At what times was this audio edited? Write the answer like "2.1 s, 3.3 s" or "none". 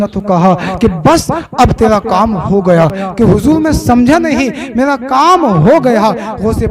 3.0 s